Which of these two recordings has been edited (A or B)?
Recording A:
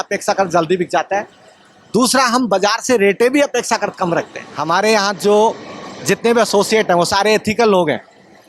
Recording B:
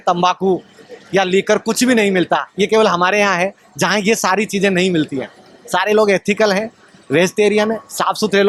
A